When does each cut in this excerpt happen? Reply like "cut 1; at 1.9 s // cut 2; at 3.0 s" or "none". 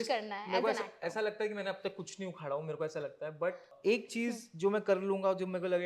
cut 1; at 3.7 s

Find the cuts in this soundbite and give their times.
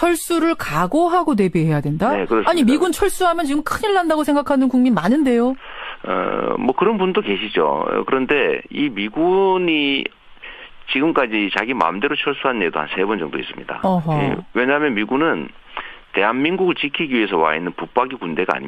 none

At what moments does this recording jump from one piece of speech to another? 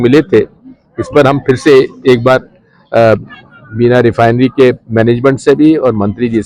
none

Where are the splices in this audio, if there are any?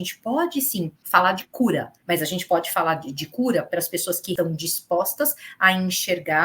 cut 1; at 1.0 s // cut 2; at 1.9 s // cut 3; at 4.3 s

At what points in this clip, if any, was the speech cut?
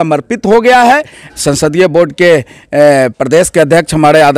cut 1; at 1.2 s

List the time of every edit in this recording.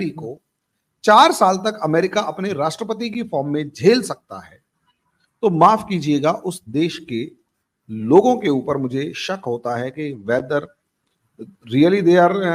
none

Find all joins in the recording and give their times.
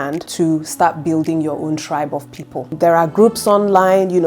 cut 1; at 2.7 s

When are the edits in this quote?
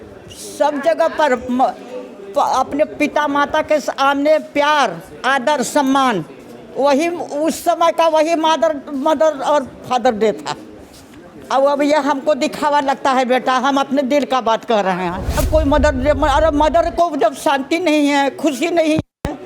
cut 1; at 15.4 s

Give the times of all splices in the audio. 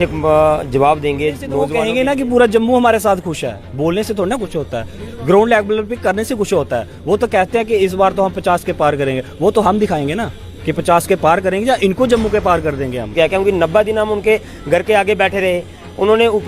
cut 1; at 1.7 s // cut 2; at 13.1 s

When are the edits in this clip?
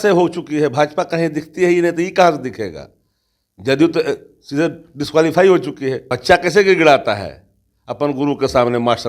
cut 1; at 6.1 s

